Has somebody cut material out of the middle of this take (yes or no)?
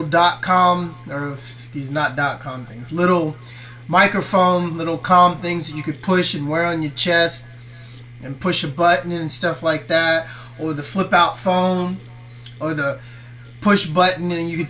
yes